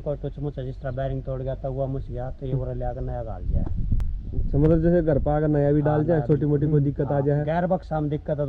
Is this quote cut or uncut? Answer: uncut